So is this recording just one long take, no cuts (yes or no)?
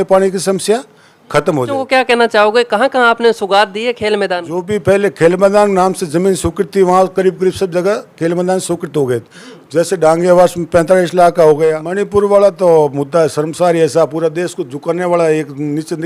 no